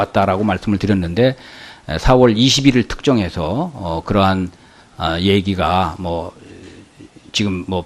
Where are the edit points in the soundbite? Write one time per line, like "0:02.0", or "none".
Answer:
0:01.1